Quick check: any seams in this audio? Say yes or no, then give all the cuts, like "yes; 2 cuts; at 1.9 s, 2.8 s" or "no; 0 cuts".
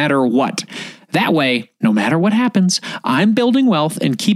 yes; 1 cut; at 1.7 s